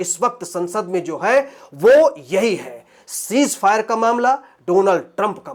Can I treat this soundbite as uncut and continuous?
yes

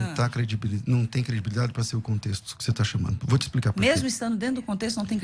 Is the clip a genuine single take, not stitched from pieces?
yes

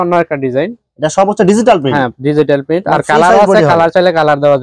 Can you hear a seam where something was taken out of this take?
no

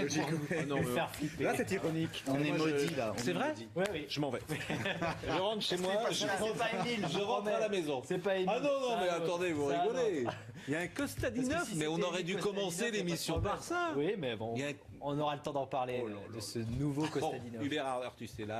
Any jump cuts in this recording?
yes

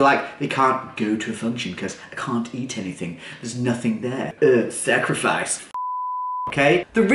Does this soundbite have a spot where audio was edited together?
yes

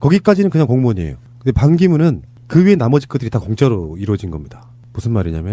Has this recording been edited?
yes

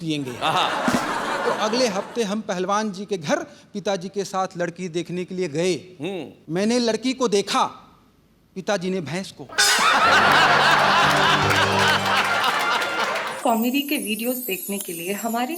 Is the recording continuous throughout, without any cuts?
no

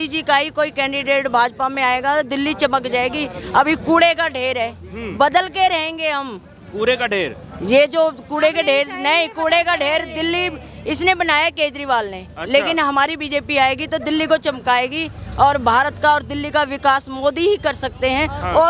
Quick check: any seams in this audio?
no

